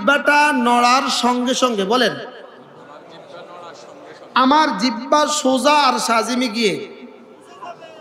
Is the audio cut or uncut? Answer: uncut